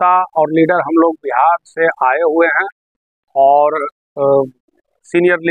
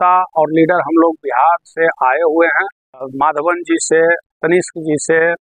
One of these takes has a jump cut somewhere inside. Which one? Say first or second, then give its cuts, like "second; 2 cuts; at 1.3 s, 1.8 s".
second; 1 cut; at 3.1 s